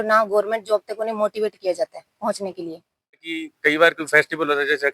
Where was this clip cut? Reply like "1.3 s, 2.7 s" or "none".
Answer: 3.3 s